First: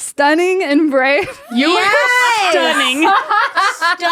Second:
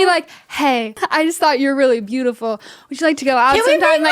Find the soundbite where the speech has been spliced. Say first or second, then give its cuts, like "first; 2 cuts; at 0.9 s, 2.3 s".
second; 1 cut; at 1.0 s